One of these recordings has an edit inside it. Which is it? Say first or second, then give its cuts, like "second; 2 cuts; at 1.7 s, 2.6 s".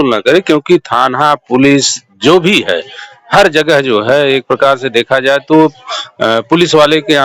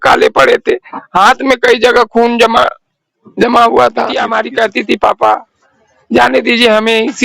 second; 1 cut; at 4.3 s